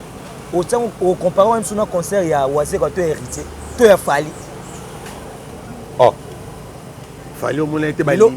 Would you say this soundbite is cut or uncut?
uncut